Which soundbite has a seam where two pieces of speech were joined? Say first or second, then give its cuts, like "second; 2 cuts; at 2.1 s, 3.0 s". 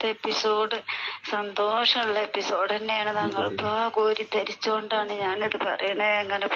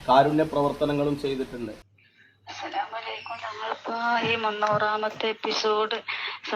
second; 1 cut; at 2.0 s